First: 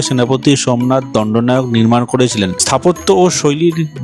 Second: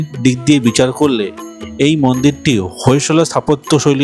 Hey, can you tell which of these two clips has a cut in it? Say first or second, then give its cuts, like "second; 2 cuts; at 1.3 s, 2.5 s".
first; 1 cut; at 2.6 s